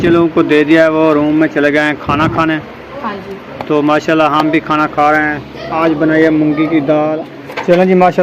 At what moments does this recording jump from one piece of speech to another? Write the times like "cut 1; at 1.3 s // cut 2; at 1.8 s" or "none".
cut 1; at 7.3 s